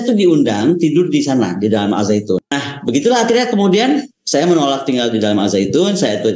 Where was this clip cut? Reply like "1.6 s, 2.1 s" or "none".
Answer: 2.6 s